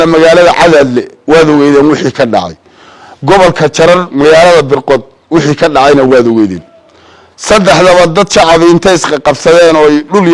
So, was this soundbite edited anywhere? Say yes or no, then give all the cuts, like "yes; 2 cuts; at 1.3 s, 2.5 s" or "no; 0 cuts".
no; 0 cuts